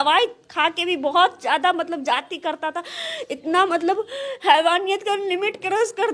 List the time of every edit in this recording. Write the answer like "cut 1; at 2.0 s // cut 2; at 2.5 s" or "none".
none